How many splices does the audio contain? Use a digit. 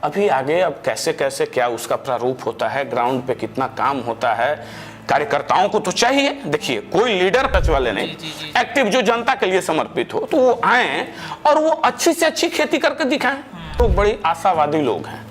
2